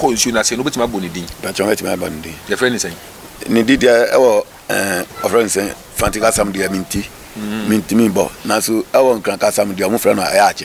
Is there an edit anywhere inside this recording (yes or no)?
no